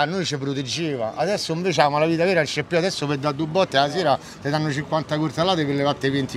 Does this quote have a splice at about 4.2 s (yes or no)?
no